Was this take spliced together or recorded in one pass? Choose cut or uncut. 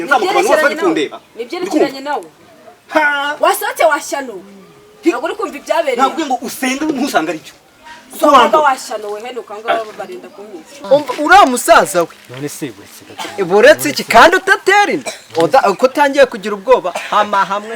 cut